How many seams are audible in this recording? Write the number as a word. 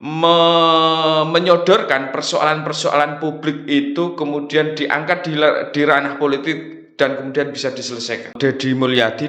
one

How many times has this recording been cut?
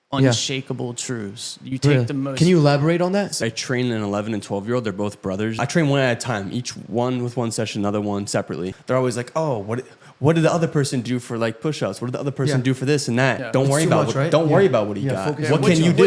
four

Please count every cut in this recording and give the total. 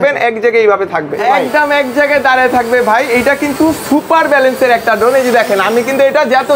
one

